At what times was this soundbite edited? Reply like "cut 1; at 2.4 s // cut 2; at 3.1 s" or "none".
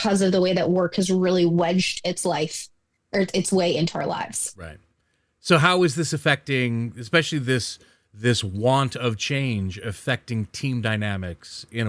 none

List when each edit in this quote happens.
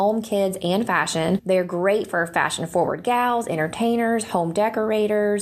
cut 1; at 1.4 s

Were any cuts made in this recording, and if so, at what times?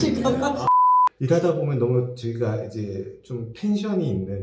cut 1; at 1.1 s

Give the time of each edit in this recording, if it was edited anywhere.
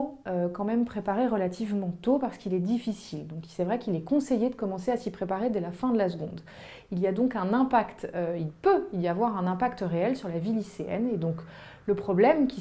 cut 1; at 4.3 s

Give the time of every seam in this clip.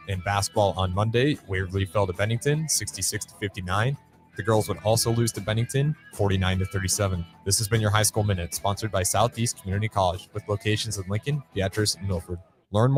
none

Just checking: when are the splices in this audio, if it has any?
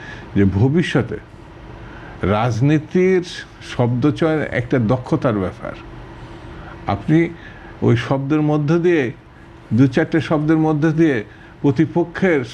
none

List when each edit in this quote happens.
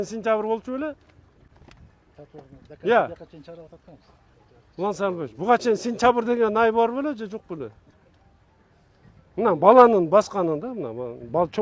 none

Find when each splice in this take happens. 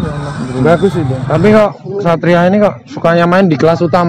cut 1; at 1.2 s

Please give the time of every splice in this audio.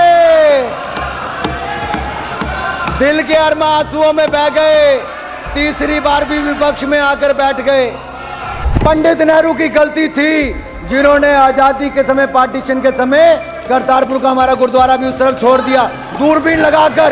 cut 1; at 8.7 s

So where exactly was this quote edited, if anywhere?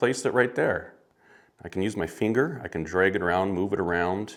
none

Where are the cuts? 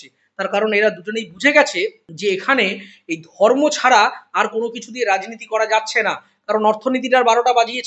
cut 1; at 2.1 s

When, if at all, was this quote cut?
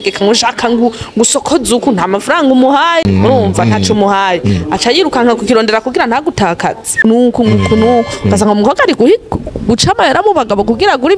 cut 1; at 3.0 s // cut 2; at 7.0 s

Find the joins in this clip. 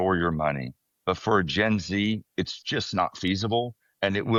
none

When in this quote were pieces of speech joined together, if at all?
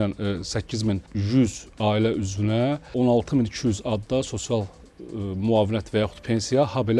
cut 1; at 1.1 s // cut 2; at 2.9 s

